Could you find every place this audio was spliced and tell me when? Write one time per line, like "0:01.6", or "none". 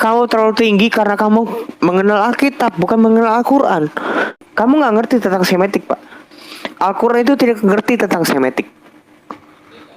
0:04.4